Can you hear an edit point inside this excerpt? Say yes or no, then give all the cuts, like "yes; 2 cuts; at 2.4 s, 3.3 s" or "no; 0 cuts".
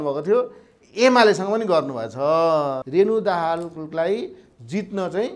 yes; 1 cut; at 2.8 s